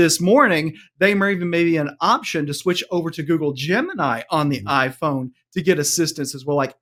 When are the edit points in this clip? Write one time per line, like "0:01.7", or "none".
none